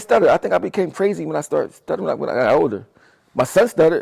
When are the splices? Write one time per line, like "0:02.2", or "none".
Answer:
none